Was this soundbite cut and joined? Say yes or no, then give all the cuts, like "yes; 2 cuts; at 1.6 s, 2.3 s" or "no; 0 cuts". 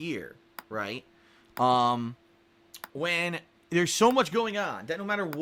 no; 0 cuts